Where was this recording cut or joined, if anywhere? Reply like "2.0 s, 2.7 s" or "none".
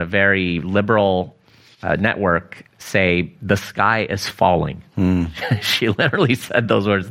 none